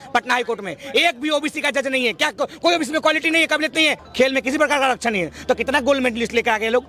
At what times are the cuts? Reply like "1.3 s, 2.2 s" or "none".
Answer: 4.0 s